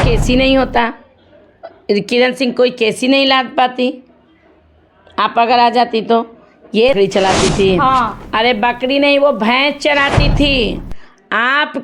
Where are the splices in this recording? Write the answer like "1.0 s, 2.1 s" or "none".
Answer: 7.0 s